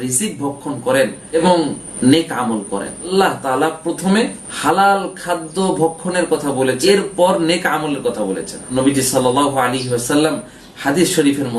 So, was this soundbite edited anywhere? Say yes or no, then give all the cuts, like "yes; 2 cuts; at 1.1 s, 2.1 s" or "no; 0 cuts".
yes; 4 cuts; at 3.1 s, 4.4 s, 6.8 s, 8.7 s